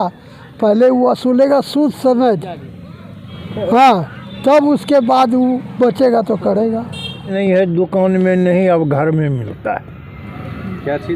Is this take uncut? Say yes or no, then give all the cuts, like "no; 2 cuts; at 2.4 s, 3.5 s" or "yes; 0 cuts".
no; 1 cut; at 7.2 s